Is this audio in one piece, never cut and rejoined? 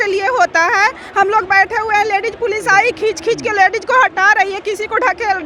yes; 0 cuts

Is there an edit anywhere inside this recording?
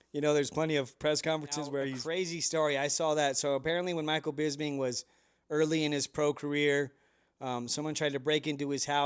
yes; 1 cut; at 2.0 s

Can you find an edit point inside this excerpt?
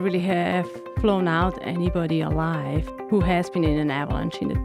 yes; 1 cut; at 2.9 s

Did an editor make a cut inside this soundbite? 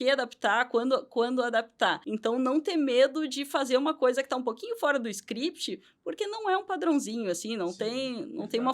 yes; 1 cut; at 2.1 s

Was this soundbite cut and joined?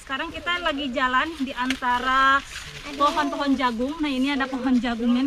no; 0 cuts

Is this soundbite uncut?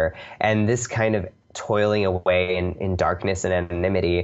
yes; 0 cuts

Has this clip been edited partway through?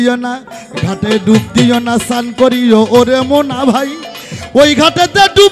no; 0 cuts

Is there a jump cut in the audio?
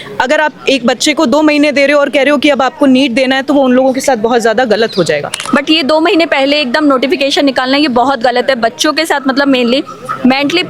yes; 1 cut; at 5.3 s

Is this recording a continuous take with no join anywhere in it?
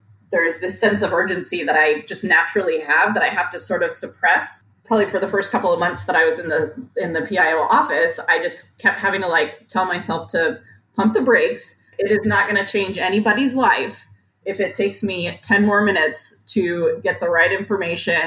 yes; 0 cuts

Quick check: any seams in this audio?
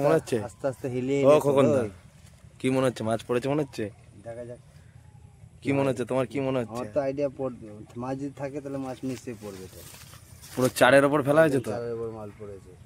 no; 0 cuts

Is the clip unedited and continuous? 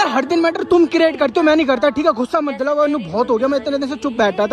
yes; 0 cuts

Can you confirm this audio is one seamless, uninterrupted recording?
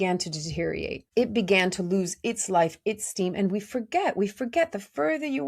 no; 1 cut; at 1.0 s

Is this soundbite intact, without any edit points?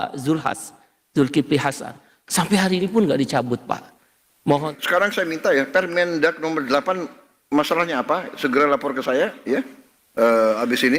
no; 1 cut; at 4.7 s

